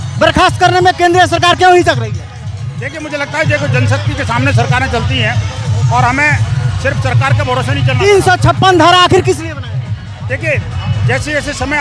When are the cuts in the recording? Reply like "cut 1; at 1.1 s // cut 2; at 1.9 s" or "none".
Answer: none